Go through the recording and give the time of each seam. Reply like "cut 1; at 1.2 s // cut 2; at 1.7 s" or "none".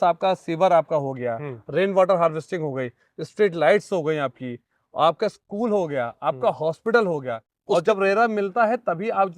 cut 1; at 7.5 s